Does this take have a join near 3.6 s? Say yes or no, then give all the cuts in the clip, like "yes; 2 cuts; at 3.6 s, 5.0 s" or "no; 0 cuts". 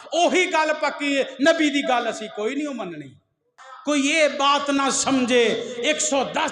yes; 1 cut; at 3.6 s